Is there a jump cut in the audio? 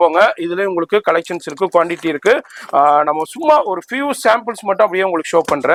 no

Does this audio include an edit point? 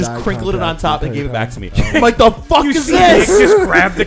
yes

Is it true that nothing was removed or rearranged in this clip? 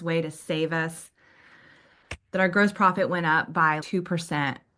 no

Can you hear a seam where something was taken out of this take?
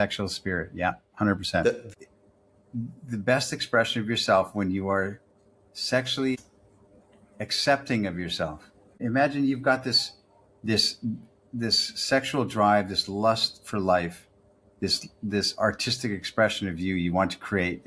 yes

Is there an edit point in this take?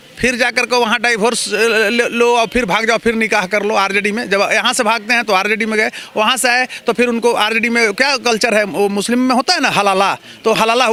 no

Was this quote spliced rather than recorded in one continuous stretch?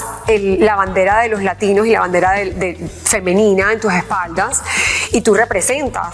no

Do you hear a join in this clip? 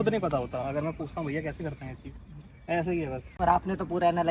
no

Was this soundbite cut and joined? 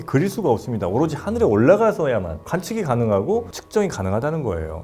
no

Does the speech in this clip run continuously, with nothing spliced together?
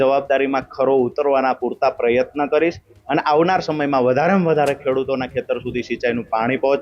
yes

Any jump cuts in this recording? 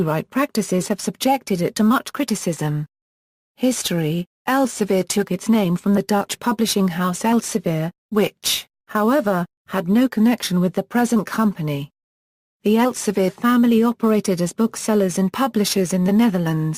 yes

